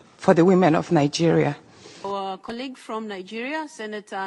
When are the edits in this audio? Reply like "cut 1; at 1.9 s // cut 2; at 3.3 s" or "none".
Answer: cut 1; at 2.0 s